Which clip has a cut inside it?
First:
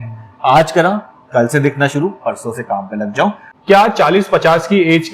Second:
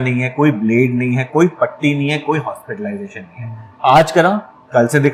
first; 1 cut; at 3.5 s

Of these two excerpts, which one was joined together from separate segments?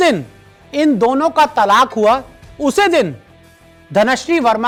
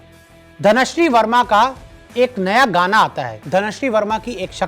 second; 1 cut; at 3.3 s

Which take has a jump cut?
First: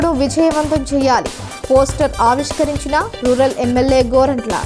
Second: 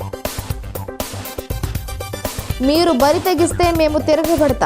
second; 1 cut; at 2.3 s

